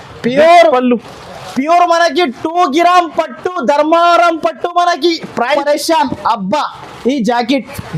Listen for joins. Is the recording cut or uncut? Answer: cut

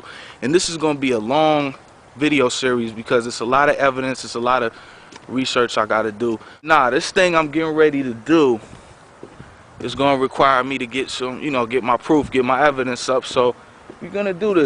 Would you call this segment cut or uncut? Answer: cut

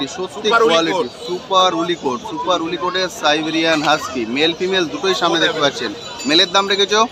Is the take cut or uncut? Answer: uncut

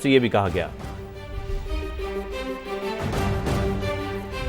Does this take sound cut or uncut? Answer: uncut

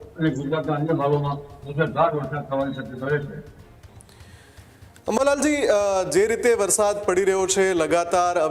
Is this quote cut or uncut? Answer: uncut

